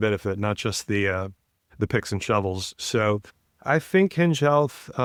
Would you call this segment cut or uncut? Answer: uncut